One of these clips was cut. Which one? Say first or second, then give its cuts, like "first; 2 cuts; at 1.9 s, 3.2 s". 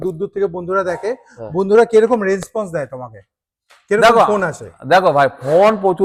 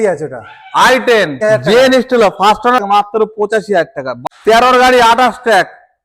second; 3 cuts; at 1.4 s, 2.8 s, 4.1 s